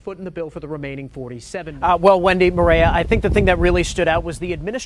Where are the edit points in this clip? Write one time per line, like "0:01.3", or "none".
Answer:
0:01.8